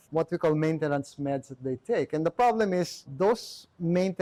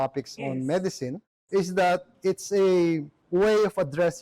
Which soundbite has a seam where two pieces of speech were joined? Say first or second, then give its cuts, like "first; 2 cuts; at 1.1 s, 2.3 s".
second; 1 cut; at 1.3 s